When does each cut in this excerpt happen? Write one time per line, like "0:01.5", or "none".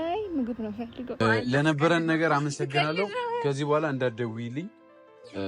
0:01.2